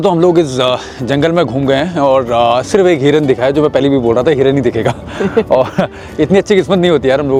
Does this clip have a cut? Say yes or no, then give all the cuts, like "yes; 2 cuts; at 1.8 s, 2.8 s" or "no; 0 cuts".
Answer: no; 0 cuts